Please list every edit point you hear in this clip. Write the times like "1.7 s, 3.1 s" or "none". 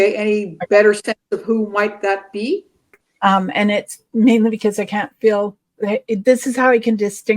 2.9 s